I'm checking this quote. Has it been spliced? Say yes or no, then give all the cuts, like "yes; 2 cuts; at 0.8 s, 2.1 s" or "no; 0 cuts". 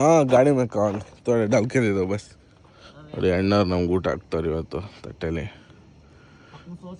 no; 0 cuts